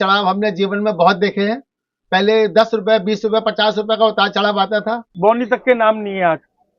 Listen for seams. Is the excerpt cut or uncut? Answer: cut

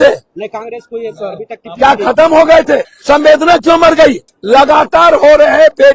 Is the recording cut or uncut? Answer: cut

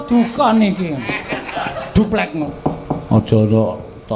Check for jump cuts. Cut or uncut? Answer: cut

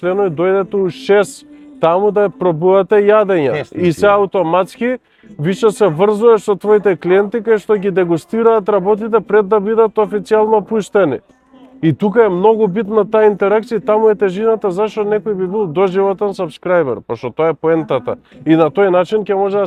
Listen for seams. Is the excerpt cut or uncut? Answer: uncut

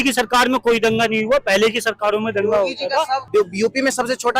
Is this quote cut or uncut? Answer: cut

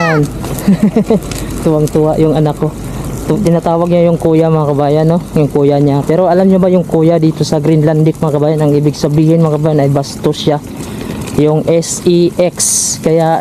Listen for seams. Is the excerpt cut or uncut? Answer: uncut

